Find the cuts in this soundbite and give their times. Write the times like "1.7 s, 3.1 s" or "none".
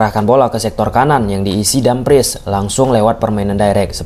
none